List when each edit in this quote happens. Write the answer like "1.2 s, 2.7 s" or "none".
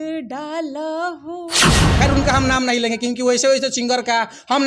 1.8 s